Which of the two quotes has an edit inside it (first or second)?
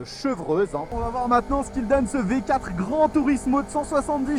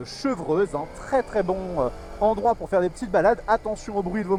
first